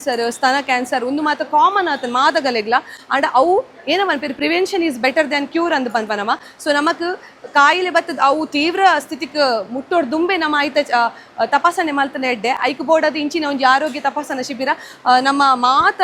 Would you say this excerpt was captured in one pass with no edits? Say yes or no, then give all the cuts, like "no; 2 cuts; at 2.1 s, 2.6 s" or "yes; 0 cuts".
yes; 0 cuts